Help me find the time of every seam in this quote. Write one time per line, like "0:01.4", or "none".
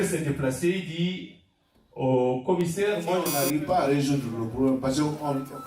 0:03.2